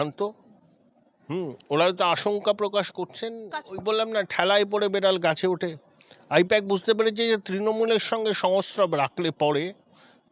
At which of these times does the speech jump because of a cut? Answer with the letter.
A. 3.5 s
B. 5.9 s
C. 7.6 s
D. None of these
A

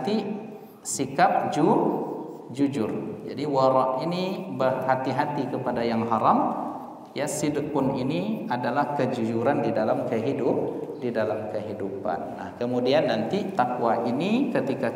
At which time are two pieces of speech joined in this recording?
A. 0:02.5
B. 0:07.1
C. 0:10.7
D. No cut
D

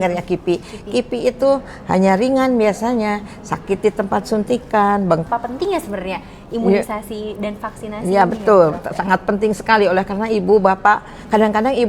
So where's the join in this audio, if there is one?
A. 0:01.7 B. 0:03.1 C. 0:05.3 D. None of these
C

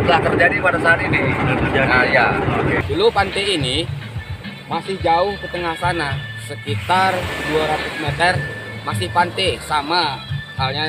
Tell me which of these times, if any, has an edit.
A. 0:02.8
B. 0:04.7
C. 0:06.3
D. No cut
A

